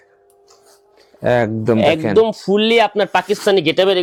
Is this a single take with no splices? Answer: yes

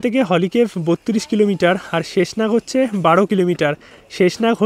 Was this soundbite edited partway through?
no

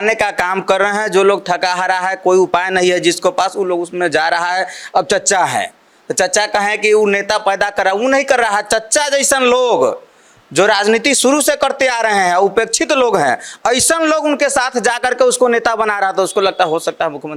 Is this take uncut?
yes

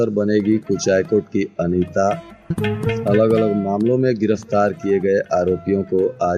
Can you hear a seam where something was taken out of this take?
no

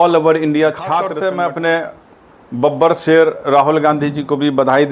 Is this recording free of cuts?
no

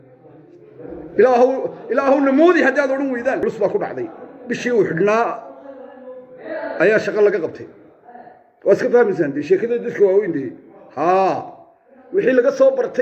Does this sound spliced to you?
yes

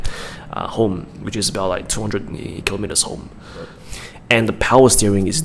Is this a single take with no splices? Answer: no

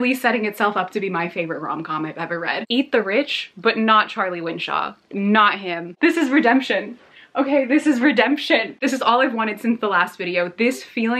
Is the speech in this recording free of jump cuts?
no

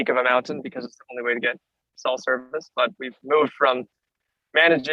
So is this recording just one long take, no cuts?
yes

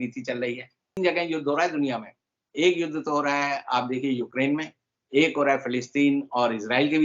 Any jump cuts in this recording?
yes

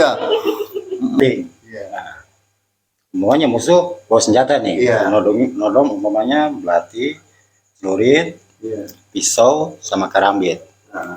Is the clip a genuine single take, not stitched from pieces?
no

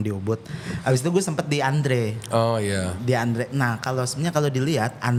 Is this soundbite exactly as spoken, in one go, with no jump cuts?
yes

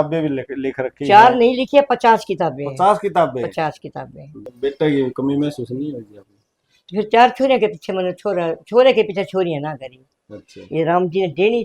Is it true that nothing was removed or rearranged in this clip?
no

